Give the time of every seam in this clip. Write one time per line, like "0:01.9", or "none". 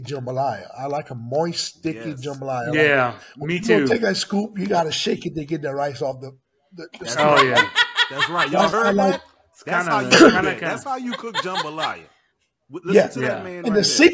none